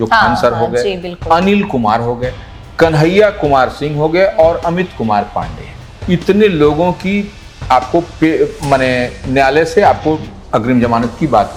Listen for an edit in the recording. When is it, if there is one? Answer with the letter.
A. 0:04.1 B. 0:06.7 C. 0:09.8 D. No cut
D